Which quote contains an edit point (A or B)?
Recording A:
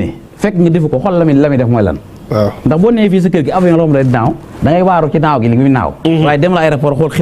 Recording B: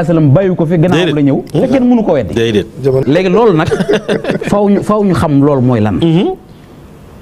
B